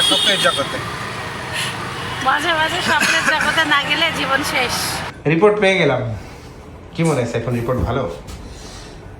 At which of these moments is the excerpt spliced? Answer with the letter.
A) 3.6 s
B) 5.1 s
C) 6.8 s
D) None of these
B